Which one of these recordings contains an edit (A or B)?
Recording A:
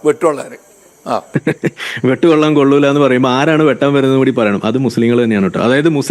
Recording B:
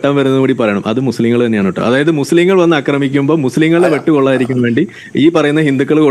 A